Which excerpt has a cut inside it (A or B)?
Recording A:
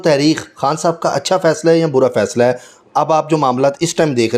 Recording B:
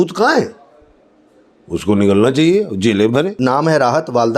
B